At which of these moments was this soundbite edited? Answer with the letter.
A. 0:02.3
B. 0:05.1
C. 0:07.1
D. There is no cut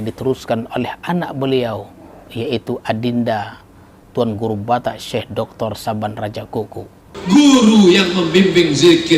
C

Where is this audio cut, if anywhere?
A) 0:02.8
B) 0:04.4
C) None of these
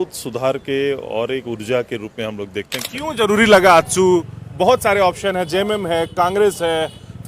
A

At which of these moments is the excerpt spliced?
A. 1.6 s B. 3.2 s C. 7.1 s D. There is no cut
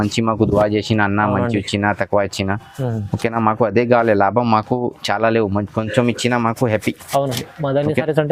D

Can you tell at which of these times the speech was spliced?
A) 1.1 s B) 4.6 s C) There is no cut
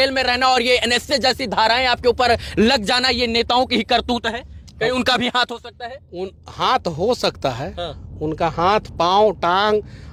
C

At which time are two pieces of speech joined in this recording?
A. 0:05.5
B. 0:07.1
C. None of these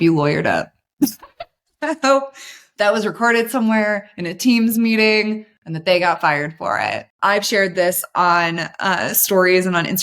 B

